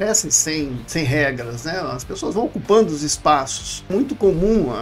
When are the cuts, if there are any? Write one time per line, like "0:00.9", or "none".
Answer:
0:03.9